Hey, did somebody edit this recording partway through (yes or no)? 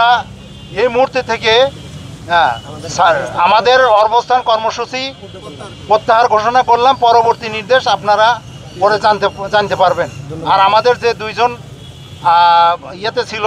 no